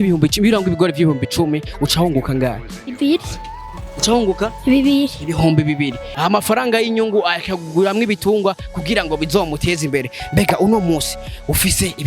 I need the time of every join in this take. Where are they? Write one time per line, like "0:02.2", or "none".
0:06.0